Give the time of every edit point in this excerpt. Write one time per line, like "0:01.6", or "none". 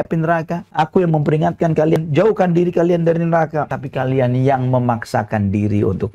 0:02.0
0:03.7